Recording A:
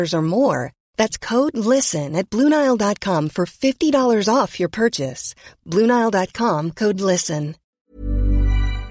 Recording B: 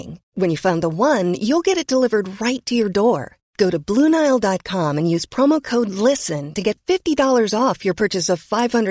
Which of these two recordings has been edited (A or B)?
A